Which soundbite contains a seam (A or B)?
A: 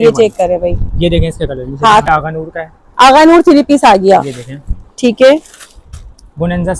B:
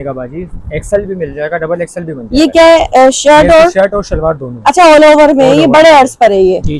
A